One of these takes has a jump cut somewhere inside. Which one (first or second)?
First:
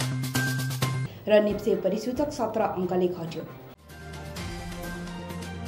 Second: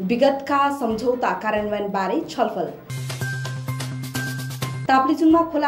first